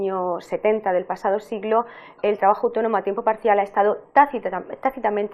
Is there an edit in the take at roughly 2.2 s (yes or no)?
yes